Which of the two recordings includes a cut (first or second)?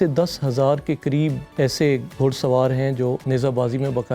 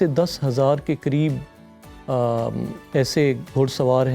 first